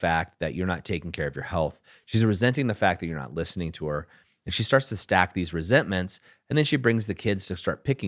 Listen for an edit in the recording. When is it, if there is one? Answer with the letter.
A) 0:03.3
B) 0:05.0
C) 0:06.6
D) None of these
D